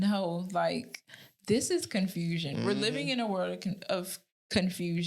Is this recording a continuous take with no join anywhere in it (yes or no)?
yes